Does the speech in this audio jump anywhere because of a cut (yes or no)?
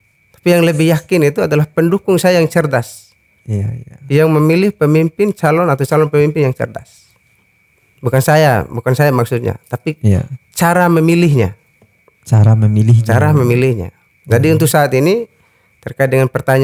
no